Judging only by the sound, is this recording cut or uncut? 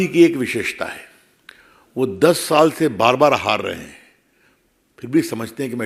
uncut